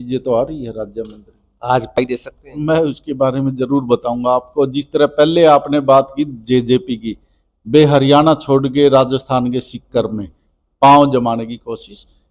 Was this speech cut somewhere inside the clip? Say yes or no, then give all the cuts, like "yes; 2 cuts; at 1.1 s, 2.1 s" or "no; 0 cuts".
yes; 1 cut; at 2.0 s